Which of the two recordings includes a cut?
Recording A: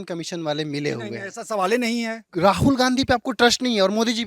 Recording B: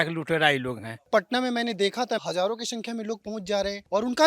B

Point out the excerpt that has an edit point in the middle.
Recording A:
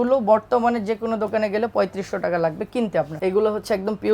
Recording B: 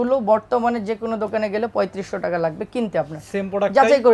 A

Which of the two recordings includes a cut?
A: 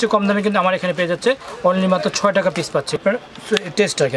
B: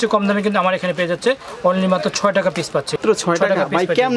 A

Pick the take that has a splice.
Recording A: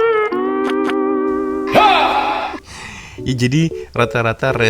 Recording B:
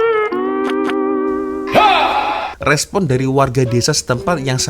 B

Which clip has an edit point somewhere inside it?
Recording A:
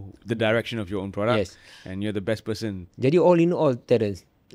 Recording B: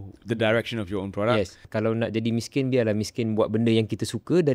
B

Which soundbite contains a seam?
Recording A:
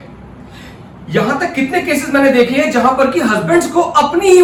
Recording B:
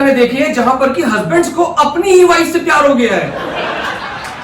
B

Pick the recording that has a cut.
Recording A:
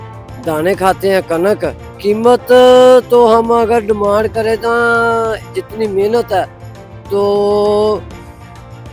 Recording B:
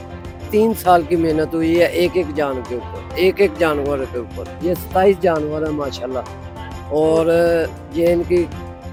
A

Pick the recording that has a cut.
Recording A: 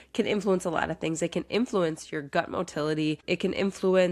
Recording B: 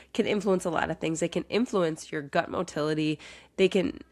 A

